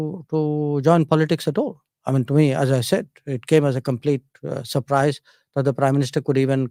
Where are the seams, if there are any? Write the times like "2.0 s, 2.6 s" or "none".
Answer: none

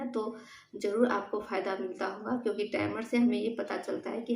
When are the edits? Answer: none

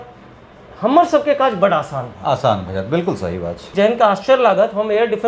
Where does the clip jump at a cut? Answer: 3.6 s

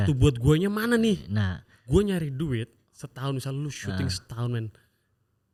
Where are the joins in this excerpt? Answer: none

